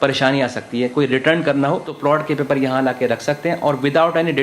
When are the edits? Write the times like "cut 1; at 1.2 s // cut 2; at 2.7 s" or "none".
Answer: cut 1; at 1.9 s